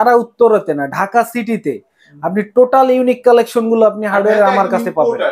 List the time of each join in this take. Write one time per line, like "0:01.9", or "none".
none

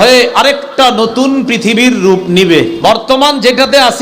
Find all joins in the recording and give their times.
0:02.7

